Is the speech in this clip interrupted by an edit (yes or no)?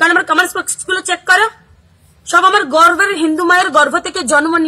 yes